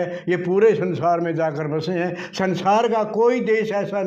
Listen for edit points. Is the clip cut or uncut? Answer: uncut